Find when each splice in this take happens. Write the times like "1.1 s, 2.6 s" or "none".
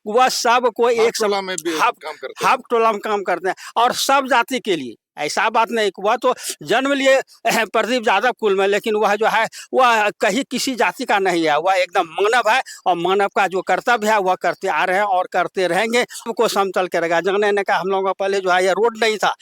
16.3 s